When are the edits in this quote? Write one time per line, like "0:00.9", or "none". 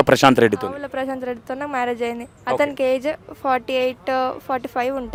none